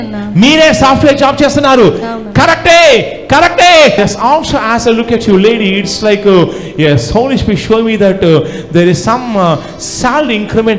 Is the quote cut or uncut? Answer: cut